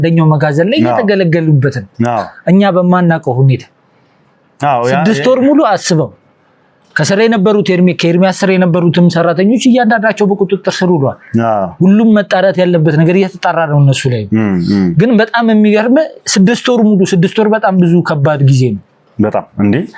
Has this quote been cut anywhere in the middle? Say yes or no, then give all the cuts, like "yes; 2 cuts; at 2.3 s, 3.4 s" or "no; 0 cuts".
no; 0 cuts